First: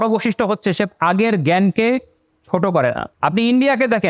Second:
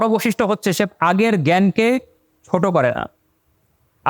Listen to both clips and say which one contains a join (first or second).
first